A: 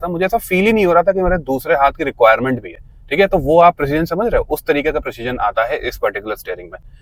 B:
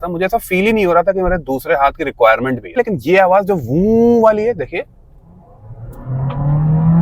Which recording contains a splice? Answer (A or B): B